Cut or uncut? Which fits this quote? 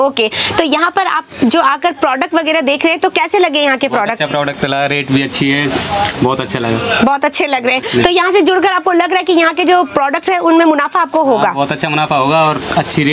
uncut